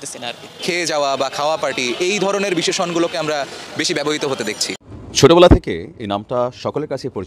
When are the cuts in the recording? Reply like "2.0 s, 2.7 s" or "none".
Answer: 4.6 s